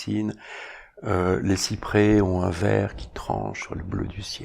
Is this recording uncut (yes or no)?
yes